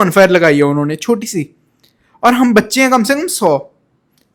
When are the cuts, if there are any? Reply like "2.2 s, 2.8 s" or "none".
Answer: none